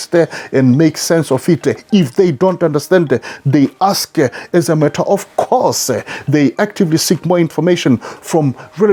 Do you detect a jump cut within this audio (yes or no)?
no